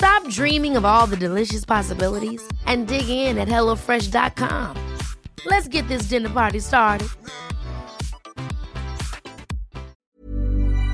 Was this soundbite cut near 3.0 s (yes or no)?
no